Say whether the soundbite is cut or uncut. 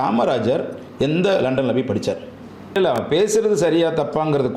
cut